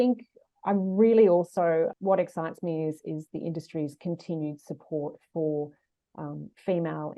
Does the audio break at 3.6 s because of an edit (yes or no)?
no